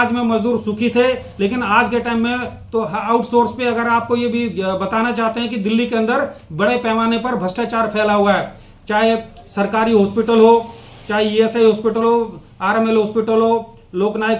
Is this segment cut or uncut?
uncut